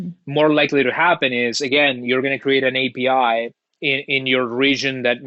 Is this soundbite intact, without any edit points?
yes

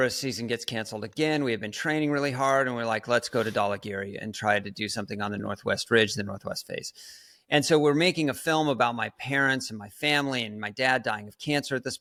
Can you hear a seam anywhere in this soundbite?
no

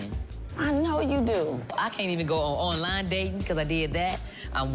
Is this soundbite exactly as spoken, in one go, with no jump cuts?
yes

